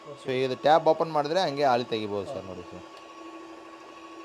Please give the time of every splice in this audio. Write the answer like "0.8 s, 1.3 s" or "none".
2.9 s

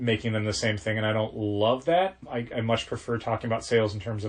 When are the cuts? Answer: 2.2 s

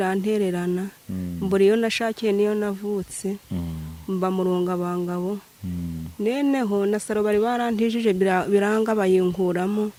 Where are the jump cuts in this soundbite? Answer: none

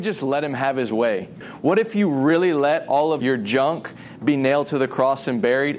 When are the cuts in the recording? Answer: 1.5 s, 3.2 s

